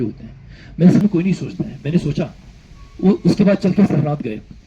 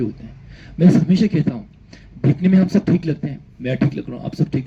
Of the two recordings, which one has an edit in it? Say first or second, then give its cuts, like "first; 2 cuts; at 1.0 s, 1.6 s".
first; 1 cut; at 1.0 s